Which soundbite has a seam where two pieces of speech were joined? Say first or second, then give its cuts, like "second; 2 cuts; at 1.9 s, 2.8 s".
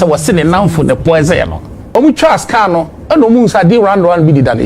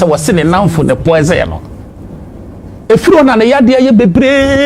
first; 1 cut; at 1.8 s